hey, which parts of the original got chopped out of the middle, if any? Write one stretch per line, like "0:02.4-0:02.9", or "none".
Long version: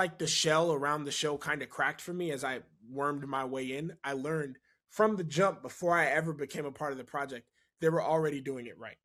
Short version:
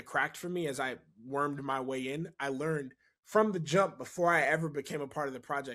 none

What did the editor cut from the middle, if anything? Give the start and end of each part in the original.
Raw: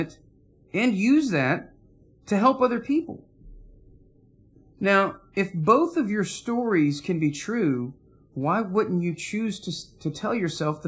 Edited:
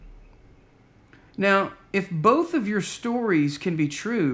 none

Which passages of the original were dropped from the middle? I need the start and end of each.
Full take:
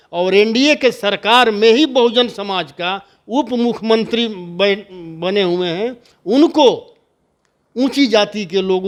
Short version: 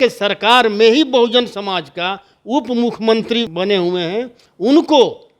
0:04.3-0:05.2

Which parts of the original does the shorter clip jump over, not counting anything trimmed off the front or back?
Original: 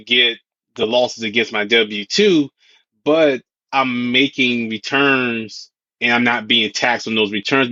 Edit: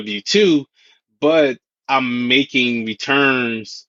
none

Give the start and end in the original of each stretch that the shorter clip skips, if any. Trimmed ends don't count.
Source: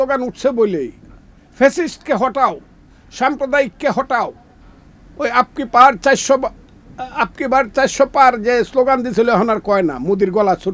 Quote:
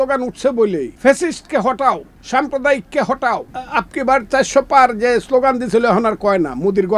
0:00.9-0:01.5
0:02.7-0:03.0
0:04.4-0:07.0

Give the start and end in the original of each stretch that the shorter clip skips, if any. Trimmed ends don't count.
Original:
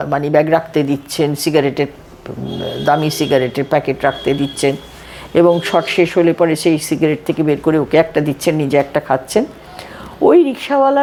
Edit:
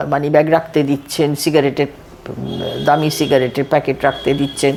none

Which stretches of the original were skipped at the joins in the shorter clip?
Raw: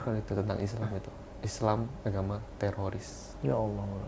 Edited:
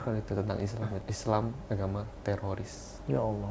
0:01.1-0:01.4

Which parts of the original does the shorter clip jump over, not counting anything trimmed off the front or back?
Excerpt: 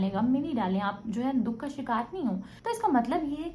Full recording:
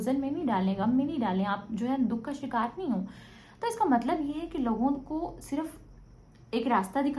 0:03.2-0:03.5

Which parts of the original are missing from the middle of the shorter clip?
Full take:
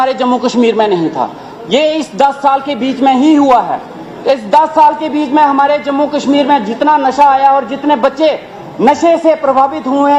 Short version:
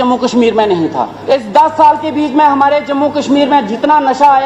0:01.3-0:04.1

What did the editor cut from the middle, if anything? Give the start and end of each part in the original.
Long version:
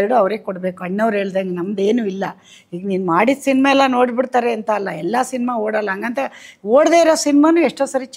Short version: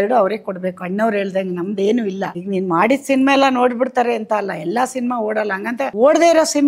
0:02.3-0:02.7
0:06.3-0:06.6

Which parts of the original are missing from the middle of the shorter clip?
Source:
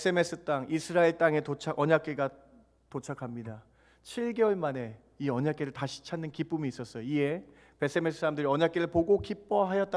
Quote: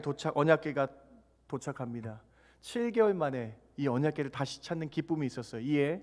none

